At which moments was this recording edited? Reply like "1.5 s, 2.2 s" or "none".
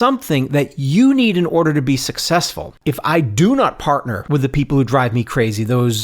2.7 s, 4.2 s